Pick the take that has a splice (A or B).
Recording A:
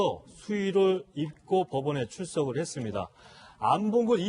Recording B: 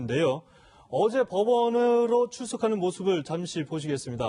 A